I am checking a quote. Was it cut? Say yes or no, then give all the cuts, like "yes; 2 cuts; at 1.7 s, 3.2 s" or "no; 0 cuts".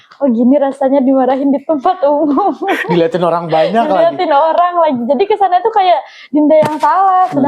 no; 0 cuts